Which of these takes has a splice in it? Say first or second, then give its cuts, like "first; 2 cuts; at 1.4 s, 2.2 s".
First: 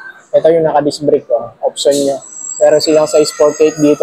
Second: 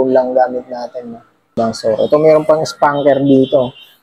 second; 1 cut; at 1.6 s